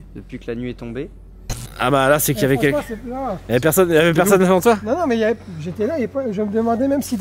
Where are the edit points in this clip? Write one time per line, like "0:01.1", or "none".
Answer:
0:01.6